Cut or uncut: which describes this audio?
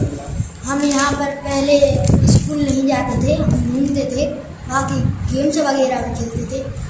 uncut